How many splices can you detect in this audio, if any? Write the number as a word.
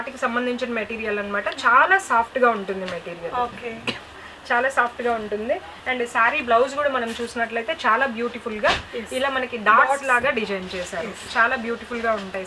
zero